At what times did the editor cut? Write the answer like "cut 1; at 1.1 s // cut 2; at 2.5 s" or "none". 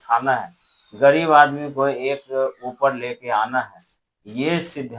none